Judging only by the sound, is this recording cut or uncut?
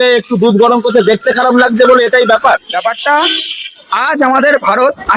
cut